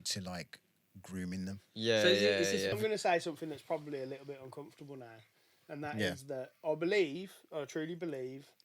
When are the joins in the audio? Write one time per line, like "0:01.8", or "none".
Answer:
0:02.8